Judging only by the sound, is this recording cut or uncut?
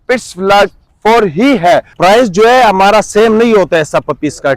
cut